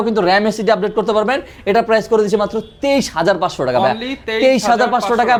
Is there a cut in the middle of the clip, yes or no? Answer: no